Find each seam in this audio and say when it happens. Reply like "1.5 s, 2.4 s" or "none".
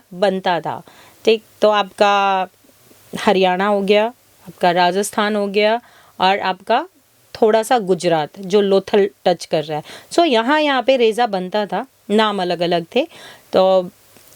none